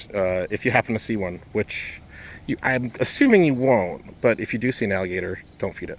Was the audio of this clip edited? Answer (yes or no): no